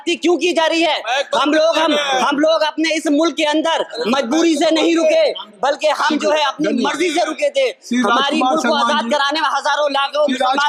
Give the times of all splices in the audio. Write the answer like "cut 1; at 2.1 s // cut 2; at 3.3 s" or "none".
none